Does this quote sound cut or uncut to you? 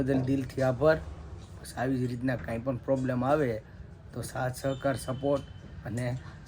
uncut